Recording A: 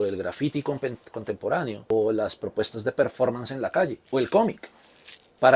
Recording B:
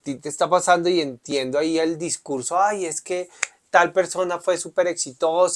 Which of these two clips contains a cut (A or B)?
A